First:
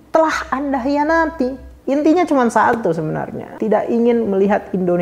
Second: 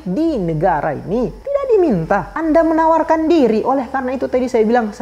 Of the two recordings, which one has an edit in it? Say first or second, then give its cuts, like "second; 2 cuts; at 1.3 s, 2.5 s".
first; 1 cut; at 1.7 s